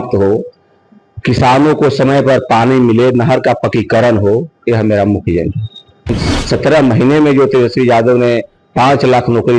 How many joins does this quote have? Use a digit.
1